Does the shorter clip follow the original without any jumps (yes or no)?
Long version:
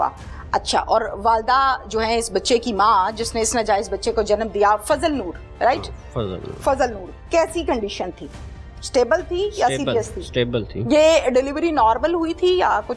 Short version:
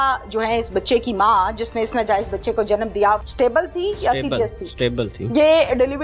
no